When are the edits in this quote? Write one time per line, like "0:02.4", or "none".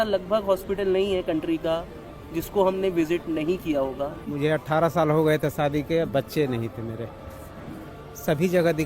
0:04.2